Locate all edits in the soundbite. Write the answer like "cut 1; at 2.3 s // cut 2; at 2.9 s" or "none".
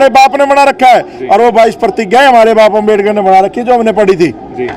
none

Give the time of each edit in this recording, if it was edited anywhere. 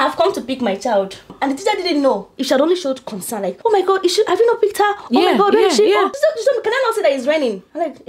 cut 1; at 1.3 s // cut 2; at 2.3 s

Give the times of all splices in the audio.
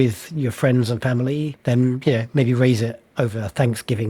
cut 1; at 1.5 s

